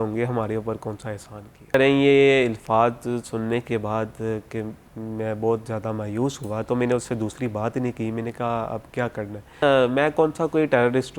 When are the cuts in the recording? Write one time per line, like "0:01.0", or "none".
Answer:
0:01.7
0:09.6